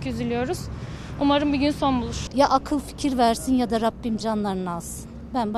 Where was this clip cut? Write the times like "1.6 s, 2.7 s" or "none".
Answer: 2.2 s